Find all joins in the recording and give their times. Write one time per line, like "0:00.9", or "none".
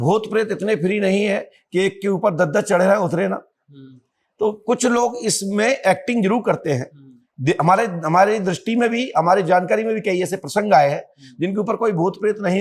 none